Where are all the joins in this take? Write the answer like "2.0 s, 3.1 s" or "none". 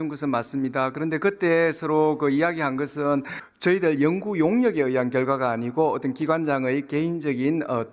3.4 s

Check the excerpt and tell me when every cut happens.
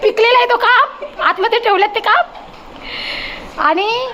none

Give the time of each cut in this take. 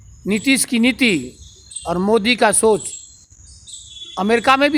none

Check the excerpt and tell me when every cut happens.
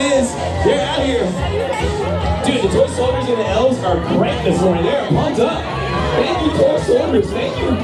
none

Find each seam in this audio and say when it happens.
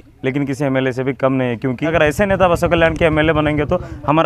1.9 s

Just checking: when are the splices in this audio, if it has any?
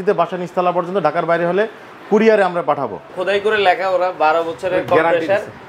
3.1 s

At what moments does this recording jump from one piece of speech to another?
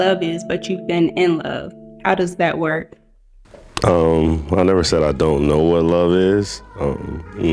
1.9 s

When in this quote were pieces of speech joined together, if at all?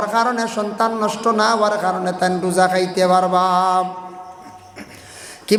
none

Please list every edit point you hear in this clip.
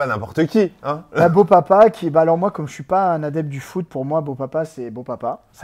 none

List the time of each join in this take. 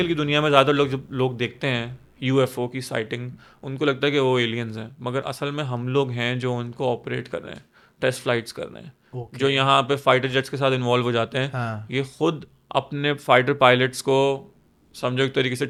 none

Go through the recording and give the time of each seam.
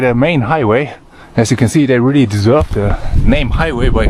none

